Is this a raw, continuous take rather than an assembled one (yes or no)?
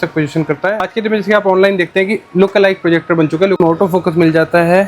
no